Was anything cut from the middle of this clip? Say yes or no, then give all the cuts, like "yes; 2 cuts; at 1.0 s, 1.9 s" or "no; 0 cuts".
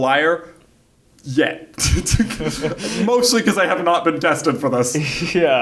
no; 0 cuts